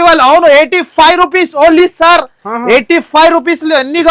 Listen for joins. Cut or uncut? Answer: uncut